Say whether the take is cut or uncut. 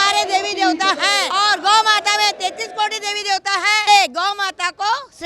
cut